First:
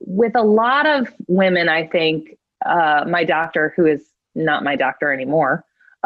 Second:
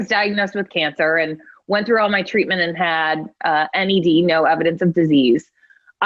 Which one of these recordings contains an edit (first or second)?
first